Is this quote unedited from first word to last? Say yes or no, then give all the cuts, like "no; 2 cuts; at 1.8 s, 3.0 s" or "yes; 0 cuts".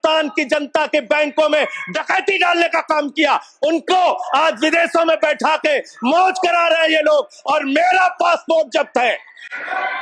yes; 0 cuts